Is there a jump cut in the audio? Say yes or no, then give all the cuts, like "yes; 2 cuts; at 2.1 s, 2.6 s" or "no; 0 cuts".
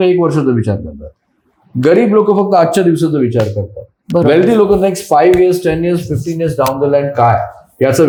no; 0 cuts